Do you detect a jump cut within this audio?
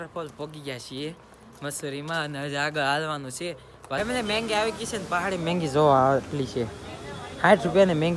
yes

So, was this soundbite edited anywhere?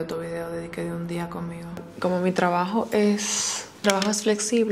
no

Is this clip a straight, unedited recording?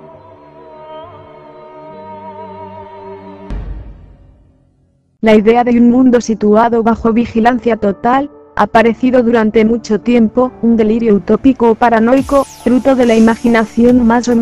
yes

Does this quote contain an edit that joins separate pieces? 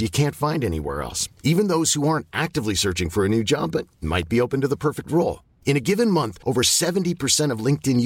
no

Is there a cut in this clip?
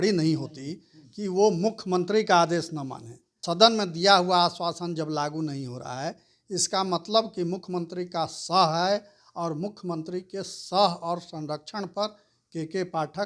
yes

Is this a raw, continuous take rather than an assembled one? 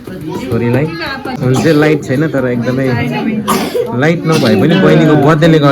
no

